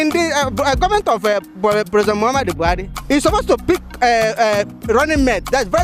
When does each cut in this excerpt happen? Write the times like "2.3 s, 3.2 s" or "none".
2.9 s, 3.6 s